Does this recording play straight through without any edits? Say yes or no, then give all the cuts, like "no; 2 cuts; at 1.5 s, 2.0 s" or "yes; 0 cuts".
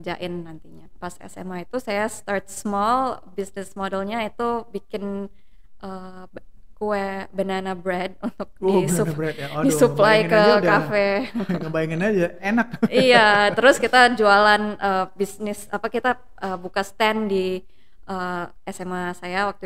no; 1 cut; at 0.9 s